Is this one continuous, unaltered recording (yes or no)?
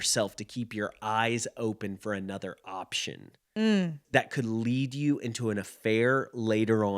no